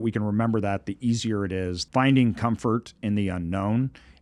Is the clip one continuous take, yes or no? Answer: no